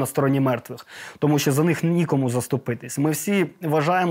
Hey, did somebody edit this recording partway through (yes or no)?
no